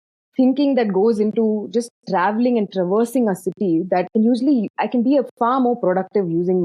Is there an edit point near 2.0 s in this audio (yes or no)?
no